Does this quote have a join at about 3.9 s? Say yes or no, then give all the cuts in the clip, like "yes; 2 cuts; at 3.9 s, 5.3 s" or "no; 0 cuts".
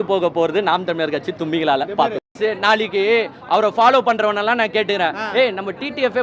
no; 1 cut; at 2.3 s